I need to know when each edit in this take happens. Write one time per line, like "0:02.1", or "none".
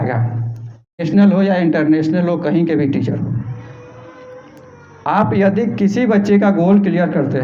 0:01.0